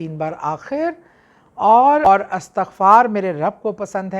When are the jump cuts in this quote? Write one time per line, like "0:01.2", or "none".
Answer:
0:02.0